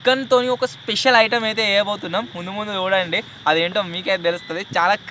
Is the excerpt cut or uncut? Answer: uncut